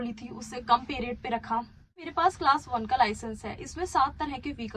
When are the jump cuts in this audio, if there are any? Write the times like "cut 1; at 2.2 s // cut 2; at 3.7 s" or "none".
cut 1; at 2.1 s